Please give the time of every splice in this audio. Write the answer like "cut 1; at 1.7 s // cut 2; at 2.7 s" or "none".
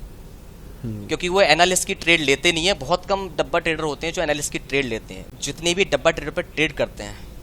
cut 1; at 5.2 s